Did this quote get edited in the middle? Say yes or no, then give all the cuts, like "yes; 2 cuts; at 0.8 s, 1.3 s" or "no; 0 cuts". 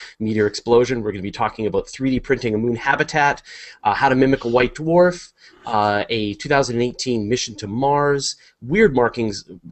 no; 0 cuts